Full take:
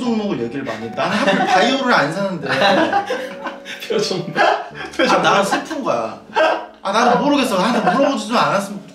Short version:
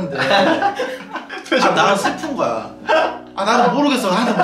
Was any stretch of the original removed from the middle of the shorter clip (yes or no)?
yes